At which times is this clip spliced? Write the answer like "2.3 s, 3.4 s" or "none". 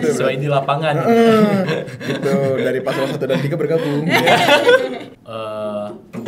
5.1 s